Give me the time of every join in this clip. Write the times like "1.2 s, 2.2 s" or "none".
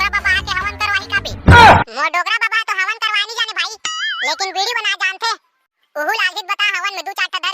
1.3 s, 1.9 s